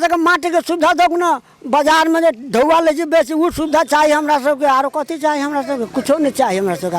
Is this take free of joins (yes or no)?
yes